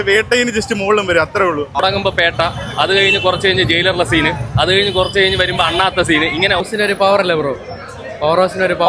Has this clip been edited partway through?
yes; 2 cuts; at 1.8 s, 6.6 s

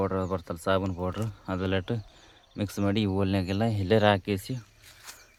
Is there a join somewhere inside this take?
no; 0 cuts

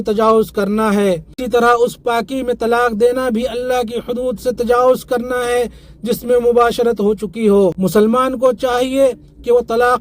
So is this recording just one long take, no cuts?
no; 2 cuts; at 1.4 s, 7.8 s

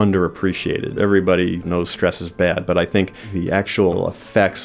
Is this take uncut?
no; 4 cuts; at 0.9 s, 1.6 s, 3.2 s, 3.9 s

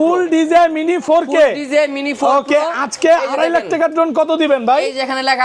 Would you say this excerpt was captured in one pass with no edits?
yes; 0 cuts

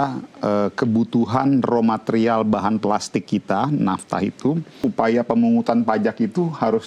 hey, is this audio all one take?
no; 1 cut; at 4.8 s

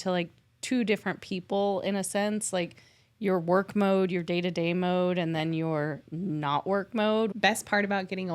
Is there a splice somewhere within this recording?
yes; 1 cut; at 7.3 s

